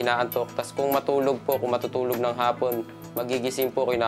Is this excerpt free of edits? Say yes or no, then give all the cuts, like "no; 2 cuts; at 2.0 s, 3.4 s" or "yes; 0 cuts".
yes; 0 cuts